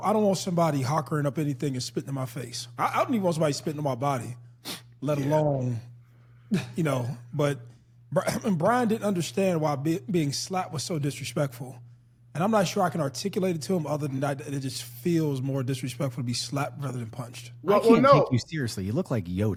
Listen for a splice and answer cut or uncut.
uncut